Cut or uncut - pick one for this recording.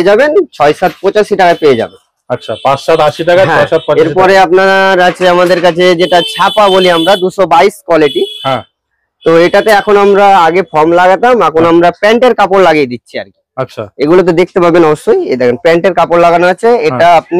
uncut